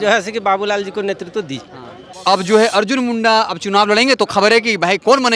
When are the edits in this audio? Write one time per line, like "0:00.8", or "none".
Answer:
0:02.1